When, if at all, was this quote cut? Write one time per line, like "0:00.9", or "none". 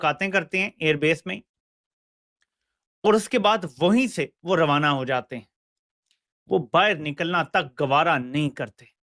none